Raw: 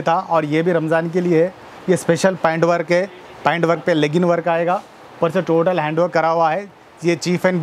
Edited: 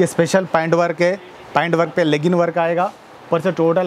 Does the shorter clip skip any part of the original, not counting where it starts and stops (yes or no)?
no